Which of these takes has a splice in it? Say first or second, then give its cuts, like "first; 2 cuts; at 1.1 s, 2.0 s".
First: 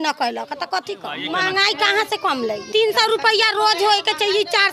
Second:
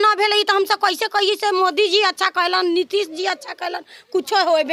first; 2 cuts; at 1.2 s, 2.6 s